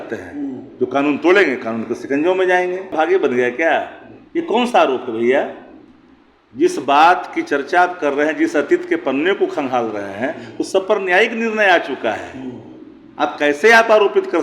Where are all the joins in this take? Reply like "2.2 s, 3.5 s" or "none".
2.9 s